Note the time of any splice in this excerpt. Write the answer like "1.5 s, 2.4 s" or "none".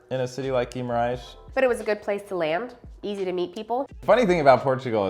1.4 s, 3.9 s